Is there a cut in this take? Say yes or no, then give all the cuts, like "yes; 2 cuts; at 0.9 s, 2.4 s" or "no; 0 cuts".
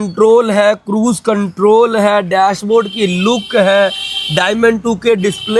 no; 0 cuts